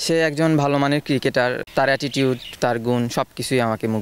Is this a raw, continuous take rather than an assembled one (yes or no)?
yes